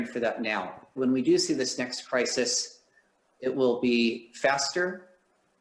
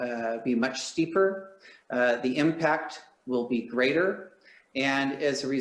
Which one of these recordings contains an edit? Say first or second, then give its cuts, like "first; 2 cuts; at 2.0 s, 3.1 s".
first; 1 cut; at 0.9 s